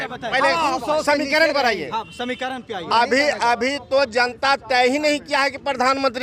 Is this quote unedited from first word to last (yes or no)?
yes